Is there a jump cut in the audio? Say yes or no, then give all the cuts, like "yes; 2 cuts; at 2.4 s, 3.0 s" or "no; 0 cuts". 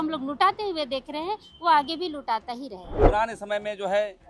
yes; 1 cut; at 3.0 s